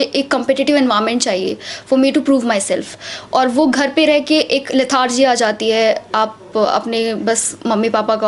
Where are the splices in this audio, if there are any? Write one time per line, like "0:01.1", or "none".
none

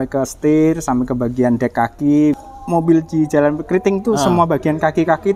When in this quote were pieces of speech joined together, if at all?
0:02.5

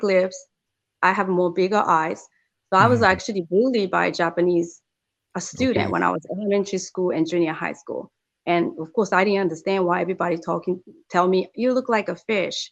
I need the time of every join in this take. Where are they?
none

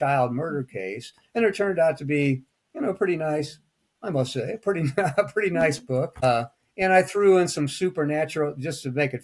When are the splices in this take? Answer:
0:06.2

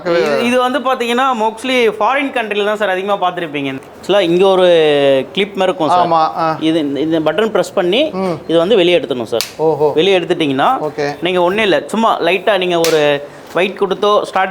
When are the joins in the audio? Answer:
0:03.8

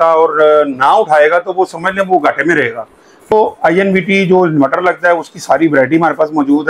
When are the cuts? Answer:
0:03.3

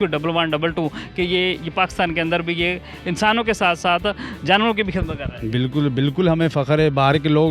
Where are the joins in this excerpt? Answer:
none

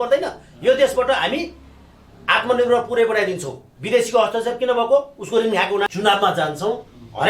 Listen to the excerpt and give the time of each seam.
0:05.9

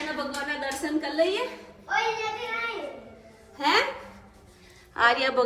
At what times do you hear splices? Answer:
none

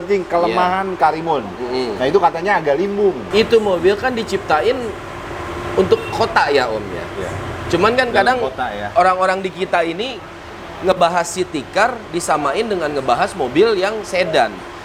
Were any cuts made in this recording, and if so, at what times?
0:03.2

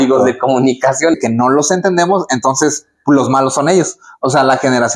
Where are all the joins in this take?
0:01.2

